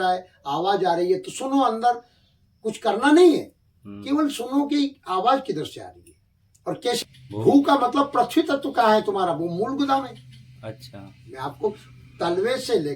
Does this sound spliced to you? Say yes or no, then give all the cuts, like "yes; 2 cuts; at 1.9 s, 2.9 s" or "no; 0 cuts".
yes; 1 cut; at 7.1 s